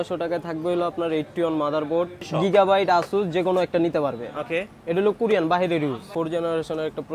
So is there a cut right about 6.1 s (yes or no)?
yes